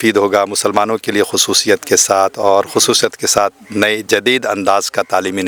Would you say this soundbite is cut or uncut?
uncut